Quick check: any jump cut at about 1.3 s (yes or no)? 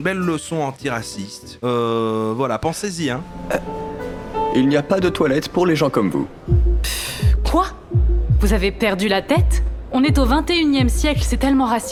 no